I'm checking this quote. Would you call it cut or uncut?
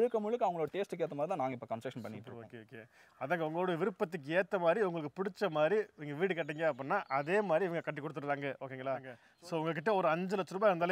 cut